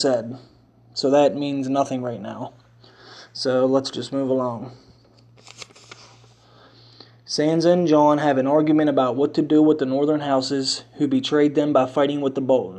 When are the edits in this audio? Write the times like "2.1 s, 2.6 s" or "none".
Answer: 8.9 s

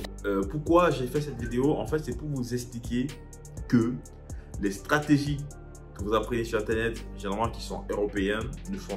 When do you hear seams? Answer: none

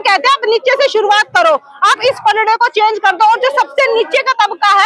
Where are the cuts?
none

